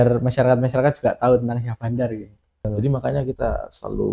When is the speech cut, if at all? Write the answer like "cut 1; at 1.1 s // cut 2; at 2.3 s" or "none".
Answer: cut 1; at 2.7 s